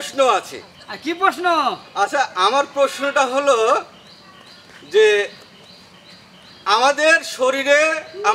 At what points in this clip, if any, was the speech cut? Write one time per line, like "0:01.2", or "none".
none